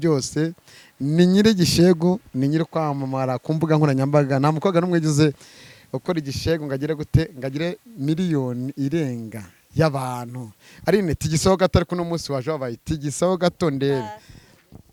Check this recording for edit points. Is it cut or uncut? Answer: uncut